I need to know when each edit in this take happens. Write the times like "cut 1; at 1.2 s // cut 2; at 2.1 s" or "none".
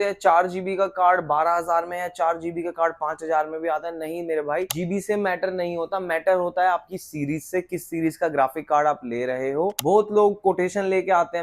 cut 1; at 4.7 s // cut 2; at 9.8 s